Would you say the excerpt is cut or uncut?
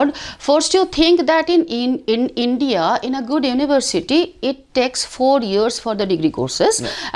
uncut